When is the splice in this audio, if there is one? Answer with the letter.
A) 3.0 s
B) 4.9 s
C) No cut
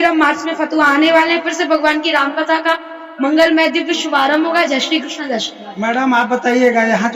C